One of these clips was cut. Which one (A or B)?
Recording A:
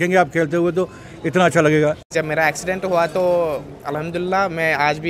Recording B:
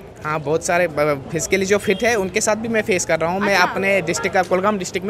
A